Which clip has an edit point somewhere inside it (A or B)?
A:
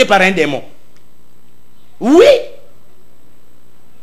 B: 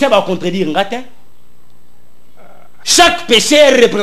B